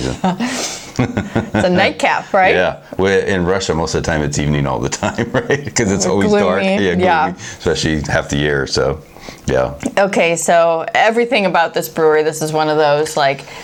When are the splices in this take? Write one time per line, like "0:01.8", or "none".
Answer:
none